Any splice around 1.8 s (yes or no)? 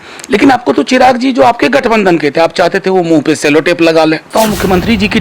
no